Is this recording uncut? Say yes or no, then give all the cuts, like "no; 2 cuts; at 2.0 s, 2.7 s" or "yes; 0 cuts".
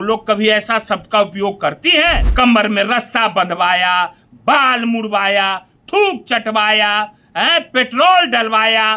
no; 1 cut; at 2.2 s